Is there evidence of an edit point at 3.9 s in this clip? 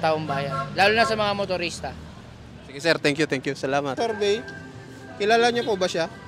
yes; 1 cut; at 3.9 s

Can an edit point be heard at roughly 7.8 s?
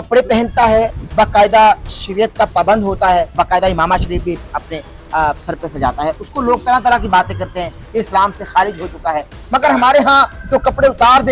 yes; 3 cuts; at 0.9 s, 3.3 s, 7.8 s

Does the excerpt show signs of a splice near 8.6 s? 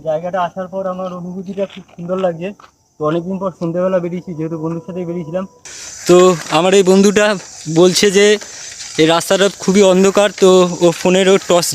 no; 1 cut; at 5.7 s

